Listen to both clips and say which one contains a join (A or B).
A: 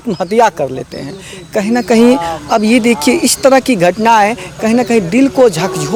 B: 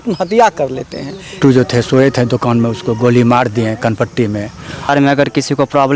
B